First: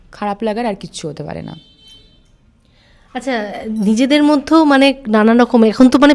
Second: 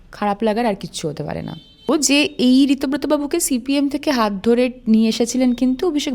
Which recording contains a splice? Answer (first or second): second